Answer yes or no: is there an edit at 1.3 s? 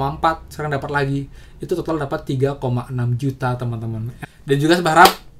no